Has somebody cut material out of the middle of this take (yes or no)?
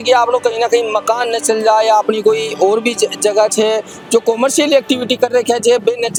no